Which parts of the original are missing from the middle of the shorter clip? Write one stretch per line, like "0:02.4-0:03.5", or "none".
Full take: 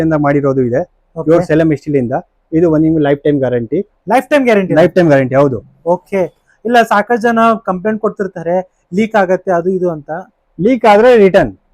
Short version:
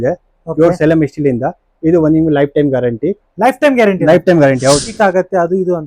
0:05.6-0:09.1